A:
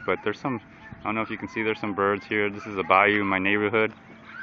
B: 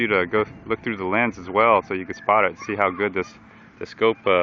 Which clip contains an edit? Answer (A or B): B